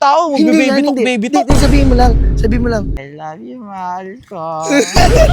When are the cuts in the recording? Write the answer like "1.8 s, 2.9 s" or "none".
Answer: 3.0 s